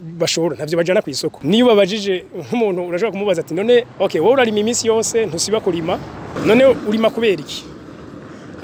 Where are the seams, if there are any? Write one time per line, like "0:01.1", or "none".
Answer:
0:01.4
0:03.9
0:06.3